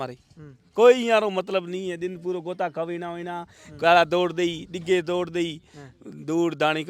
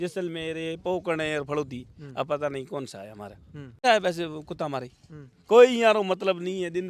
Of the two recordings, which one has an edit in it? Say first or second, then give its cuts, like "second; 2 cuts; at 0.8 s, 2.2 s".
second; 1 cut; at 3.8 s